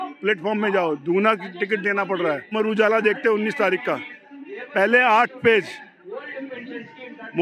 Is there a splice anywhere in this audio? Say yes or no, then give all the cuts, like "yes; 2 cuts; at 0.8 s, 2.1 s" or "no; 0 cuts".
yes; 1 cut; at 2.5 s